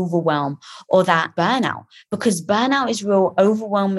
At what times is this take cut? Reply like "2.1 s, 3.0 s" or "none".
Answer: 1.3 s